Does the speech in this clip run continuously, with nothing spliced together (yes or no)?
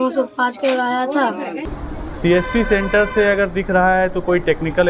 no